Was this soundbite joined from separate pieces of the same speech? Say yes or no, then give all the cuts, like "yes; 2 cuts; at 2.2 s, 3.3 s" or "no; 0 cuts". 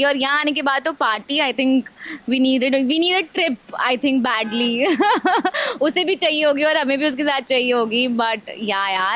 no; 0 cuts